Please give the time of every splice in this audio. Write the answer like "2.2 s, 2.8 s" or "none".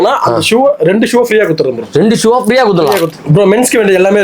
3.1 s